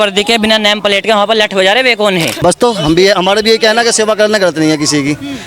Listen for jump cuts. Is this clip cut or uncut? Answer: cut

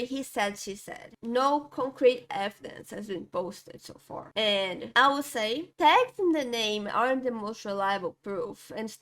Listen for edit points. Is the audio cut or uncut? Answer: uncut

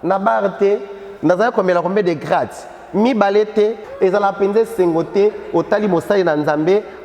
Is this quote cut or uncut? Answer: cut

